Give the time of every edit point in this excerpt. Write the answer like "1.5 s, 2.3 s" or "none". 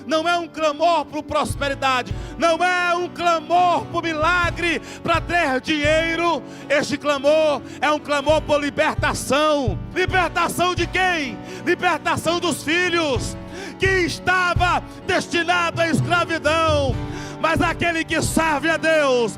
2.1 s, 9.8 s